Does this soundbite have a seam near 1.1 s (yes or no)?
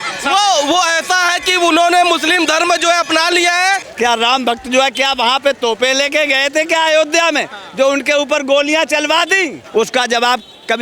no